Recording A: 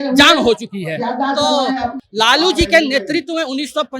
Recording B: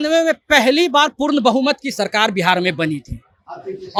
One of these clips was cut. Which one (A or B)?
A